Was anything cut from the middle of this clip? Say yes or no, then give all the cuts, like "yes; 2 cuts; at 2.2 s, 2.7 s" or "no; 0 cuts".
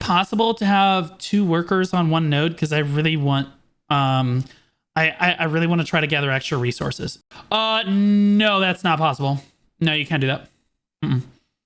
yes; 1 cut; at 7.2 s